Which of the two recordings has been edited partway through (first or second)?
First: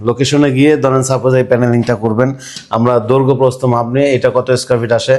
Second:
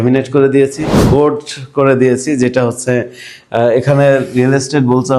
second